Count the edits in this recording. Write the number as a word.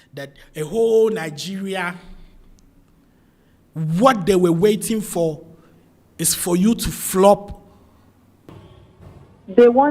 one